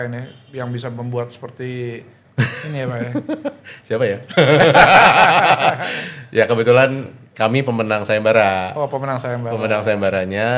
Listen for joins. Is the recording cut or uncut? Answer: cut